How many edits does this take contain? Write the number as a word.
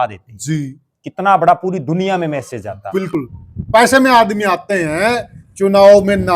one